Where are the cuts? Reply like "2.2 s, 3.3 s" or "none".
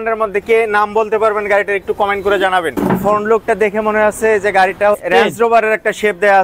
2.8 s